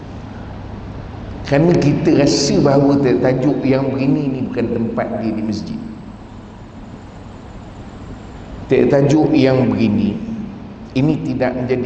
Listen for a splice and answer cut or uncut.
uncut